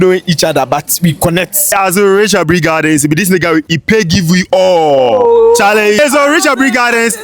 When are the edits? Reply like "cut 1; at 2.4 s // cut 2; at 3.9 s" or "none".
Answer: cut 1; at 1.7 s // cut 2; at 6.0 s